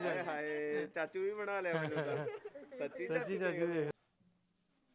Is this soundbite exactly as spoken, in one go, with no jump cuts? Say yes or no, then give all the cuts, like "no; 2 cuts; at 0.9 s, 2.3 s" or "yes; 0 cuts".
no; 1 cut; at 3.9 s